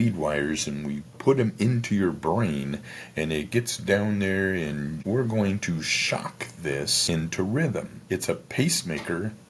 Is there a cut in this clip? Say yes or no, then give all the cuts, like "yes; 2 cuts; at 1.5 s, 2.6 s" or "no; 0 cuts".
yes; 4 cuts; at 1.1 s, 5.0 s, 7.0 s, 7.9 s